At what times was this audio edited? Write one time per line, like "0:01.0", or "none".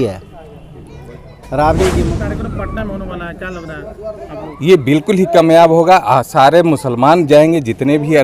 0:02.1